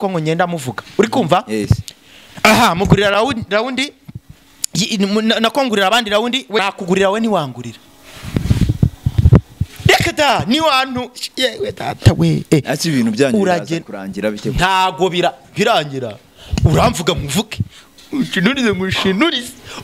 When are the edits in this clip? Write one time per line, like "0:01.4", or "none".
0:06.6

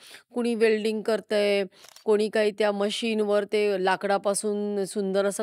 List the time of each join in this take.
none

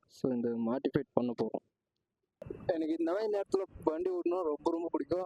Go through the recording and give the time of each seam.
0:02.4

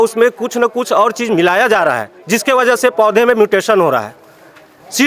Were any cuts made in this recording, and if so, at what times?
none

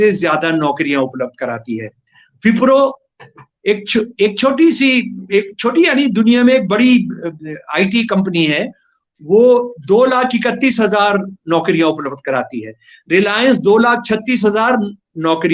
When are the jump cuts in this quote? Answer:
none

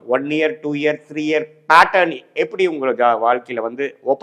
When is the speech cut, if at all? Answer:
none

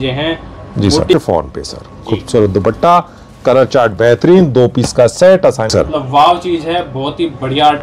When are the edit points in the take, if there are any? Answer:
0:01.1
0:05.7

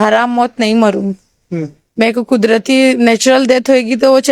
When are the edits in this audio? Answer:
none

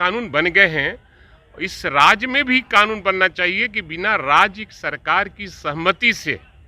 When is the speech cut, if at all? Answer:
none

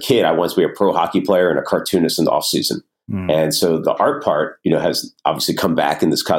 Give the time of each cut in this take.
0:03.8

